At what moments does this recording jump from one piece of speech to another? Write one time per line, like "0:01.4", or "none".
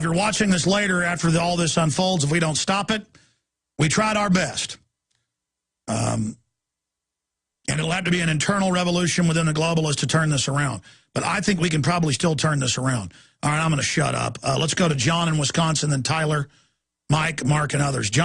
0:07.5